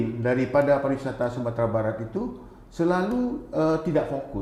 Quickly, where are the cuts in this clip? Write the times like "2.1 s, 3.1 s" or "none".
none